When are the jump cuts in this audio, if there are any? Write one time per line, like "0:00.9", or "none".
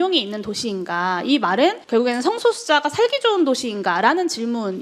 0:01.8